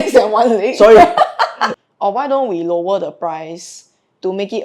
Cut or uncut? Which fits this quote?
cut